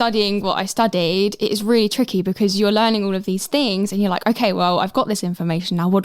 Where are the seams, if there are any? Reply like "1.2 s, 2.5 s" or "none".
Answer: 1.4 s

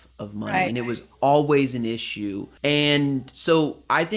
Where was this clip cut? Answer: 2.5 s

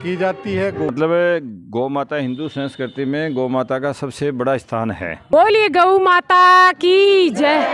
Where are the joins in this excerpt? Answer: 0.9 s, 5.3 s

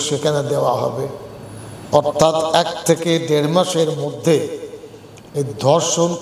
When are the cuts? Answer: none

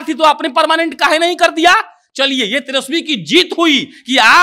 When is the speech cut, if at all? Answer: none

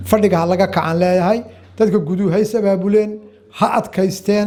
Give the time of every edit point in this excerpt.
none

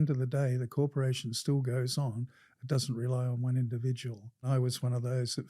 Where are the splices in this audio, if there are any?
4.5 s

